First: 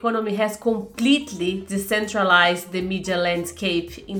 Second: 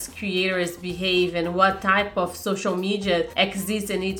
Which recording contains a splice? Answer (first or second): second